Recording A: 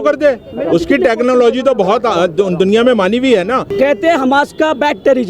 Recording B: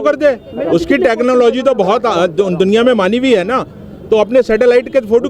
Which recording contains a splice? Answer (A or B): A